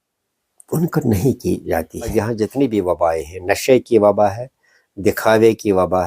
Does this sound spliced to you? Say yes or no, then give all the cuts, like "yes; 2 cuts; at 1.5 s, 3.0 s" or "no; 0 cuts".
yes; 1 cut; at 2.1 s